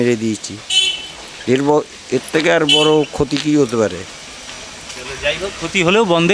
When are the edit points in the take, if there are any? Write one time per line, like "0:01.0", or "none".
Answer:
none

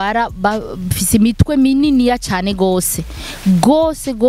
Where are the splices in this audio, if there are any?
none

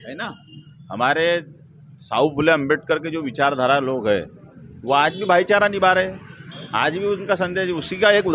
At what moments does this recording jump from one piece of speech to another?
none

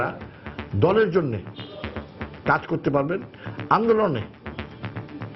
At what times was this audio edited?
none

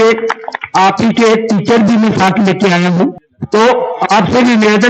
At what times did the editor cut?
0:03.3

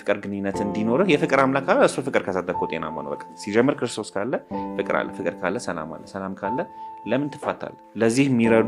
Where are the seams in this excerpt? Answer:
none

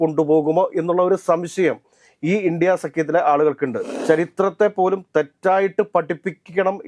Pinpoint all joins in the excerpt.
0:03.9

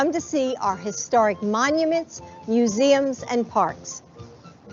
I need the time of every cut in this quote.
0:03.2

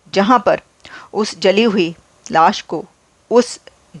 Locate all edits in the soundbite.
none

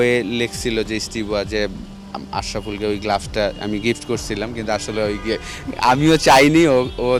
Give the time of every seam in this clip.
none

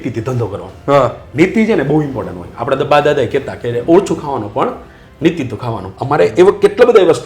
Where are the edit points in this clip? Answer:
0:05.9

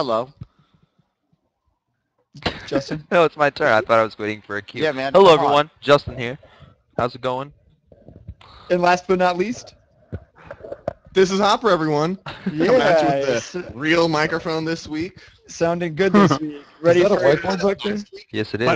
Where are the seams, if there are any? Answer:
0:02.5

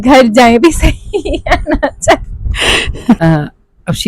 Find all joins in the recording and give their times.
0:03.2

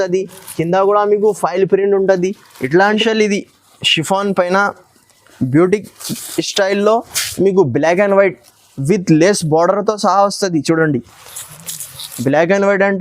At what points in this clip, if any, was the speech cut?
0:03.0

